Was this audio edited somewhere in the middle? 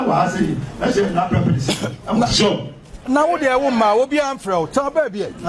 no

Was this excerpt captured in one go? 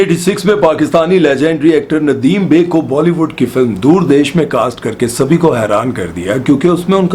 yes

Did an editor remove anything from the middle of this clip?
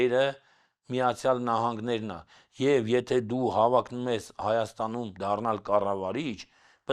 no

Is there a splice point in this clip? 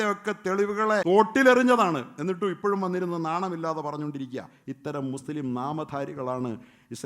yes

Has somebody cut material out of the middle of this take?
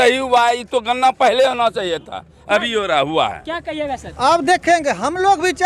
no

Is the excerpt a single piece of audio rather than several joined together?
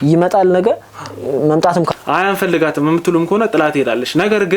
no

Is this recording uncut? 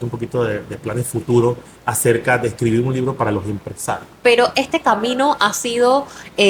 no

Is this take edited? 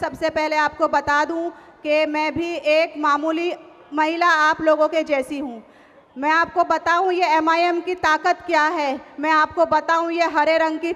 no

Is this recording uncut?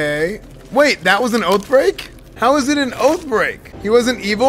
yes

